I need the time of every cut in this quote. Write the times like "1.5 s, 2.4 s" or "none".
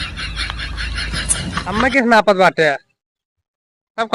1.7 s